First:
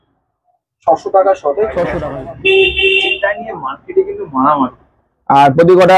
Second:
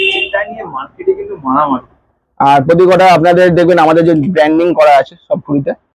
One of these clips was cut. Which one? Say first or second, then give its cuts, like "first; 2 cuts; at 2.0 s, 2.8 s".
first; 1 cut; at 2.0 s